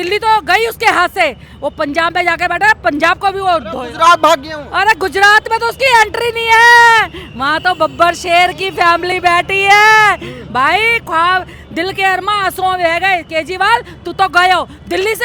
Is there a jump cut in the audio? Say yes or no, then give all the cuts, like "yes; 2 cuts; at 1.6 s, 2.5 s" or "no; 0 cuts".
no; 0 cuts